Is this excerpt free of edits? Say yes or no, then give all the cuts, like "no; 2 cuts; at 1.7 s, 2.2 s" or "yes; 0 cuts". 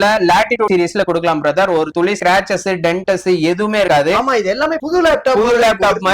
yes; 0 cuts